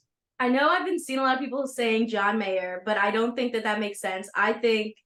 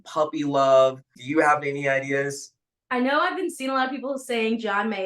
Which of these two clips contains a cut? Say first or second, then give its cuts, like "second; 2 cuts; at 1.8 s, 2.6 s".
second; 1 cut; at 1.2 s